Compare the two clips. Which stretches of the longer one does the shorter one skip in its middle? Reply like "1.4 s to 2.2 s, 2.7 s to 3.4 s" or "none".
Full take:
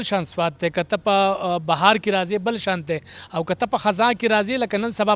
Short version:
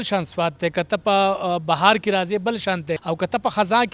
3.0 s to 3.3 s